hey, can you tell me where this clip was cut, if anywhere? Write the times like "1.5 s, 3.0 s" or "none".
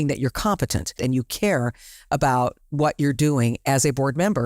0.9 s